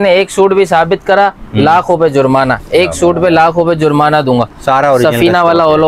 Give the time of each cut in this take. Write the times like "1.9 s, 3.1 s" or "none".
none